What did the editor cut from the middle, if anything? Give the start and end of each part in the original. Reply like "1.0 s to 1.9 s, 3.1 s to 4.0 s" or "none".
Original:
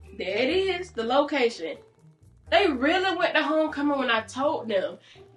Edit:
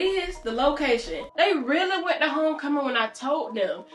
1.7 s to 2.3 s